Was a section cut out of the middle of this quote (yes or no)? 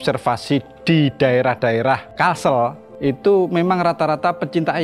yes